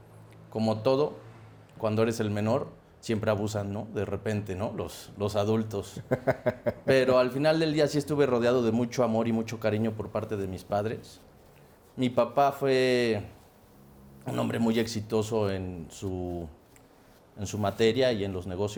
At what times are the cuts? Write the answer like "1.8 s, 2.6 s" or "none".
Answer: none